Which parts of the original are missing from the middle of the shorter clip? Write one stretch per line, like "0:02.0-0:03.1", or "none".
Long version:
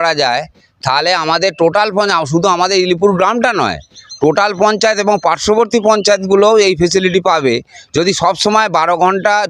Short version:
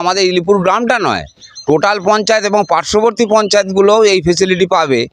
none